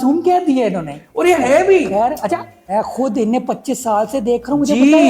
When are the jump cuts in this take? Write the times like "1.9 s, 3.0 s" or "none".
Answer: 2.6 s